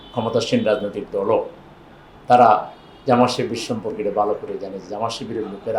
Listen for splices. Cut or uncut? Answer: uncut